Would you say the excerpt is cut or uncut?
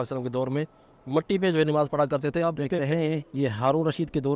cut